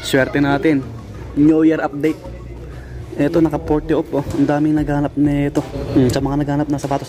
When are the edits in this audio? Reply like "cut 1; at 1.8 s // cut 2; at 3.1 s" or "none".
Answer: cut 1; at 5.8 s